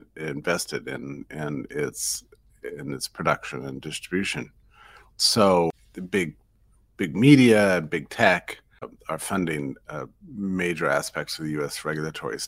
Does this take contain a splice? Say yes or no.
yes